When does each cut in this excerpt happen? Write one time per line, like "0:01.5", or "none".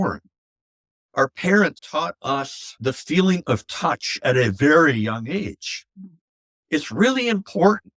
0:01.8
0:02.8